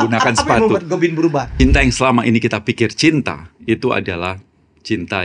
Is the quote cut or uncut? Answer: cut